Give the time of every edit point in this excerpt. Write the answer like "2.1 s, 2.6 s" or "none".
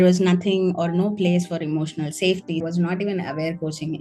2.6 s